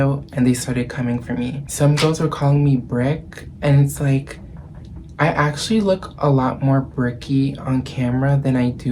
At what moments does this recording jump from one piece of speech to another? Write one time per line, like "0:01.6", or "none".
0:01.6